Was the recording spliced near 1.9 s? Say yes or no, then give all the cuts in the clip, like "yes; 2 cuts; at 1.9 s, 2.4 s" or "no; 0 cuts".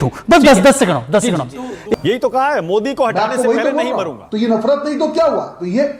yes; 1 cut; at 1.9 s